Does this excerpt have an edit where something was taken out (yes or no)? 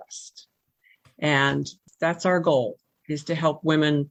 no